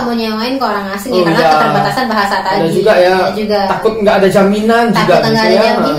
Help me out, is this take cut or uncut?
uncut